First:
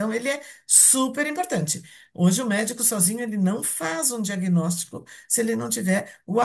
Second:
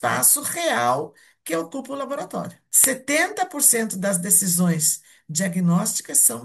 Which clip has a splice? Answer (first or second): second